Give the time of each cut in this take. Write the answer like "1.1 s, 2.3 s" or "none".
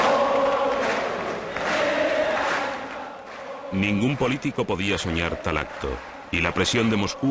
3.5 s